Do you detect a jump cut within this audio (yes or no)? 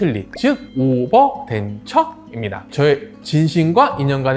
yes